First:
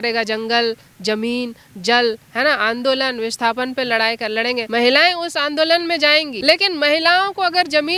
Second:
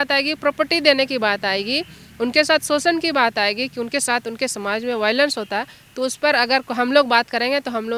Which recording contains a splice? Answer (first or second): first